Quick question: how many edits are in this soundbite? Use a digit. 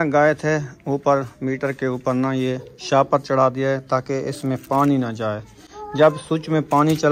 0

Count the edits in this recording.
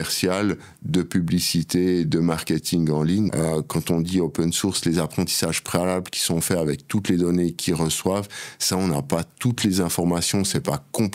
1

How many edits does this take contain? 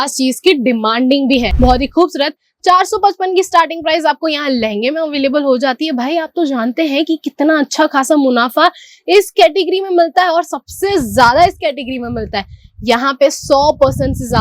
1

